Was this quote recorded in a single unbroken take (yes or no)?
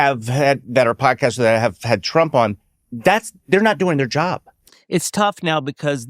no